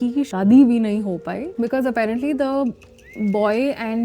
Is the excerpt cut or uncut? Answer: uncut